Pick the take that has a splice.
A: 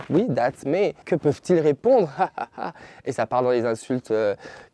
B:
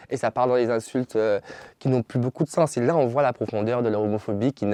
A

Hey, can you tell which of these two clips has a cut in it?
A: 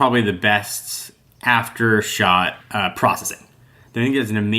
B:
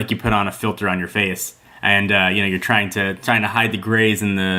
A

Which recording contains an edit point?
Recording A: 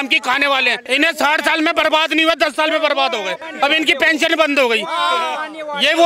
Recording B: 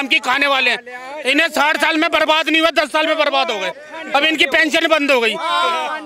A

